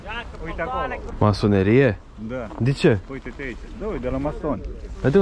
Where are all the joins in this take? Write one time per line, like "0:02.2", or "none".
0:01.1

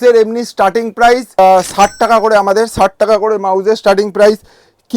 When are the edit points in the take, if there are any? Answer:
none

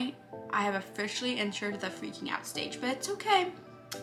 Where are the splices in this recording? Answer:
none

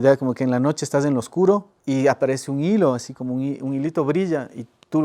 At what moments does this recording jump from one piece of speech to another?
0:01.7

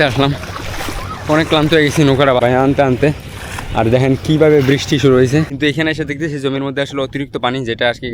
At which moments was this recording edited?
0:02.4
0:05.5

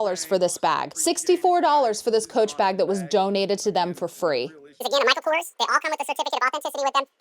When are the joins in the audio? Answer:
0:00.9
0:04.8

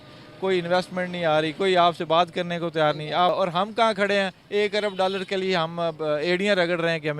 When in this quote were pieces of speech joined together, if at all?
0:03.3

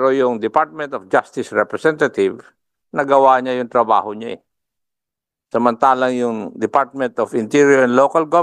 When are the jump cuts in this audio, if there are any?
none

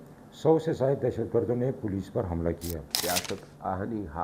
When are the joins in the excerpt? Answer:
0:03.0

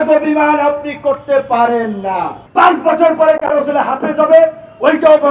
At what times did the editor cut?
0:02.3

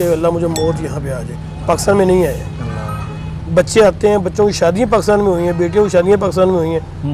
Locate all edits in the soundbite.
none

